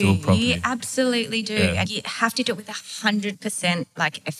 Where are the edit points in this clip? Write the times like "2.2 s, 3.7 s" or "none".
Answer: 1.8 s, 3.4 s

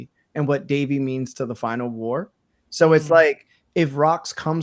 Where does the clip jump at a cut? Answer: none

